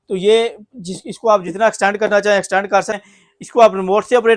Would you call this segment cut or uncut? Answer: cut